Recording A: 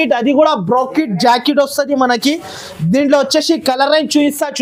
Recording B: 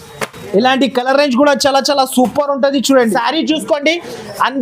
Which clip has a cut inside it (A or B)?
B